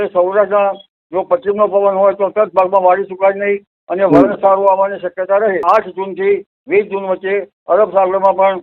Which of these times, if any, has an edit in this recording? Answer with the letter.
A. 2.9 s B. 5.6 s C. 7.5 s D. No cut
B